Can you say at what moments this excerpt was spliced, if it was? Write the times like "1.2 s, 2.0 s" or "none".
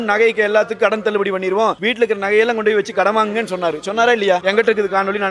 1.8 s, 4.4 s